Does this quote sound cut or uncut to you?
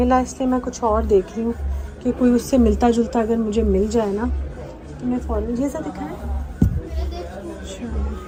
uncut